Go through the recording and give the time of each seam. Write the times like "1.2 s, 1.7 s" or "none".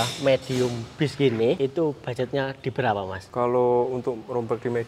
1.6 s, 3.2 s